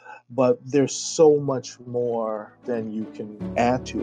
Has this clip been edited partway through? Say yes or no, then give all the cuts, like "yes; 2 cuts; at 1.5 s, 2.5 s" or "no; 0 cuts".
yes; 1 cut; at 3.0 s